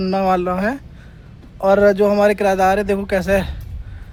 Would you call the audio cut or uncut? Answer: uncut